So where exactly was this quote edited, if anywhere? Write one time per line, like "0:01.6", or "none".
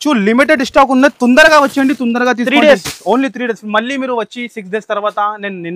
none